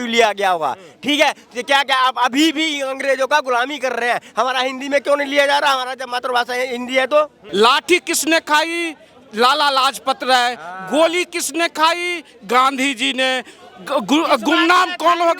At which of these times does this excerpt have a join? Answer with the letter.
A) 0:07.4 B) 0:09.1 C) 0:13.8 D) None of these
A